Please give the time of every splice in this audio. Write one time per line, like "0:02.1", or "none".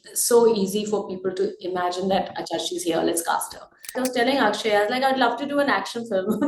0:04.0